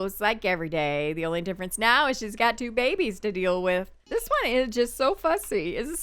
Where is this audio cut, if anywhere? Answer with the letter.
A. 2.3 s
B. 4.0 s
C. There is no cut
B